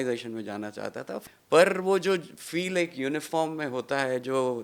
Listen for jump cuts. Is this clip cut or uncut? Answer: cut